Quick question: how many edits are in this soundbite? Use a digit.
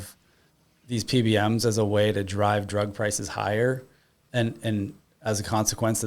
0